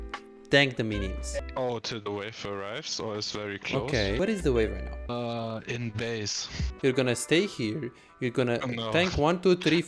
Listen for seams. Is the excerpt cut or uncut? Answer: cut